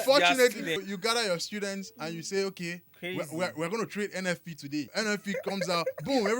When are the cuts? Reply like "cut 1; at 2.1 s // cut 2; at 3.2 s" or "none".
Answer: cut 1; at 0.8 s // cut 2; at 4.9 s